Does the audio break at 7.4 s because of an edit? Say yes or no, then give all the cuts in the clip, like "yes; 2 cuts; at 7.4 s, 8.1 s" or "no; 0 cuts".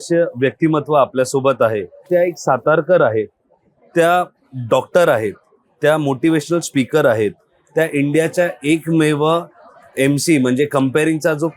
no; 1 cut; at 2.1 s